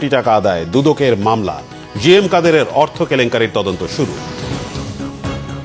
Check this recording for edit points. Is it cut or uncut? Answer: cut